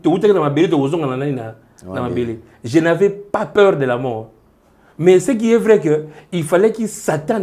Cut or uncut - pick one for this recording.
uncut